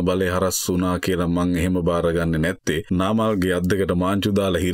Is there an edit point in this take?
yes; 1 cut; at 2.8 s

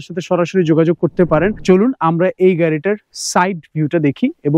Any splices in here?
yes; 1 cut; at 1.6 s

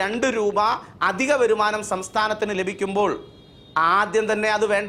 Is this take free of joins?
yes; 0 cuts

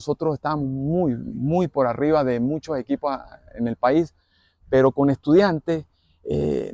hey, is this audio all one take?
yes; 0 cuts

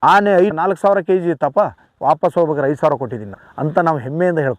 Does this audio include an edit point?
no; 0 cuts

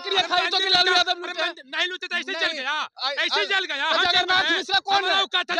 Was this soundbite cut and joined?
no; 0 cuts

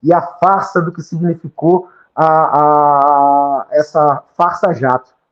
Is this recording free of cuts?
yes; 0 cuts

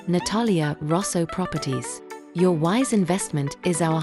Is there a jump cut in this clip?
no; 0 cuts

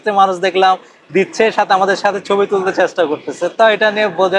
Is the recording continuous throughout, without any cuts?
yes; 0 cuts

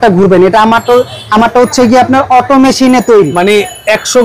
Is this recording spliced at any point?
no; 0 cuts

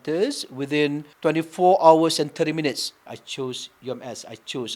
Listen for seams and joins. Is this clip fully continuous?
no; 2 cuts; at 1.1 s, 3.2 s

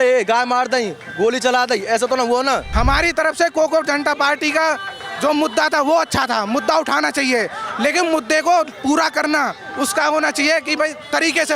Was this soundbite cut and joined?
yes; 1 cut; at 2.7 s

